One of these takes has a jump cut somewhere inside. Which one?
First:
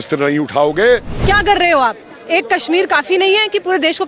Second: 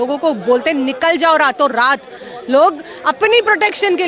first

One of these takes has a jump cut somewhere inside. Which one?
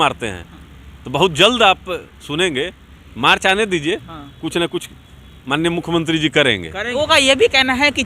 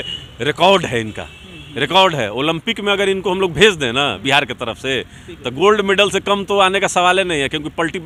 first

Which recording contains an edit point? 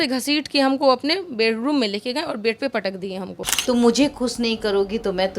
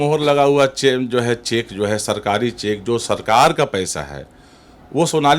first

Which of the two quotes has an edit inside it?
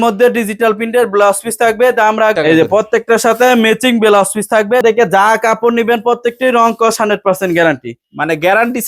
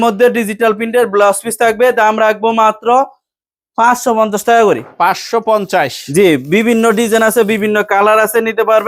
first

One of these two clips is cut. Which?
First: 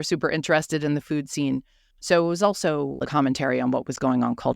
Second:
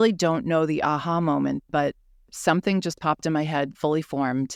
first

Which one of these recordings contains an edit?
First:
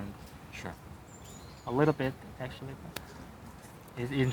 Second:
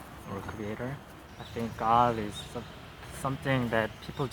second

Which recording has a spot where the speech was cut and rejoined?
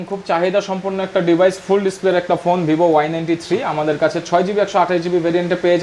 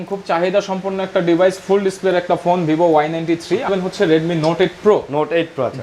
second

